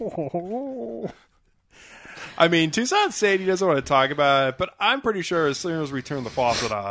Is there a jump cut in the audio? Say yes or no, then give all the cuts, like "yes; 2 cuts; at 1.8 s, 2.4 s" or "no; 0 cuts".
no; 0 cuts